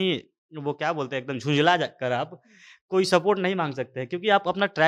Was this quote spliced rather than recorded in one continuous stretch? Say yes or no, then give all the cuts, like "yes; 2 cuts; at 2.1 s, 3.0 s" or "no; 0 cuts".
no; 0 cuts